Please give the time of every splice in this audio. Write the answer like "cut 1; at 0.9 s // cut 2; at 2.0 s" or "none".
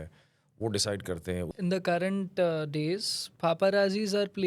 cut 1; at 1.5 s